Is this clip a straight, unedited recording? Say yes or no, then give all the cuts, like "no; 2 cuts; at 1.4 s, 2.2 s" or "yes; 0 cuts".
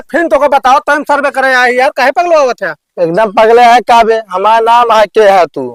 yes; 0 cuts